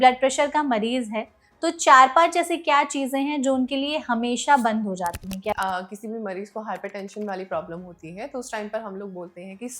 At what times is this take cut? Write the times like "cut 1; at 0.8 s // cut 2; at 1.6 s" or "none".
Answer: cut 1; at 5.5 s